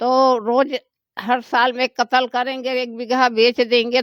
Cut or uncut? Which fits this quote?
uncut